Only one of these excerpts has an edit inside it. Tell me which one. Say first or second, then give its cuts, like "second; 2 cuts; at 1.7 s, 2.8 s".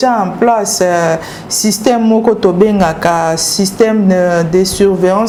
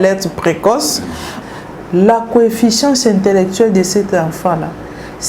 second; 1 cut; at 1.4 s